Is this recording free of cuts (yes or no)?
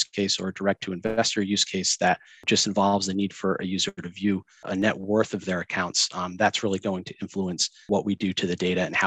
no